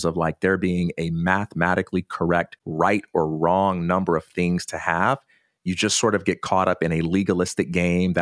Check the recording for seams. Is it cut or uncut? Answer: cut